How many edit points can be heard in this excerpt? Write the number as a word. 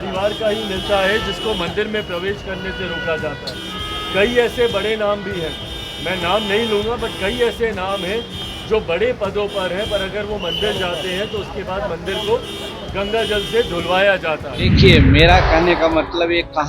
one